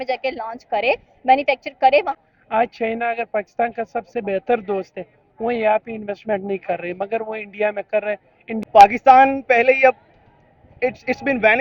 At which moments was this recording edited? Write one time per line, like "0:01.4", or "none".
0:02.2
0:08.6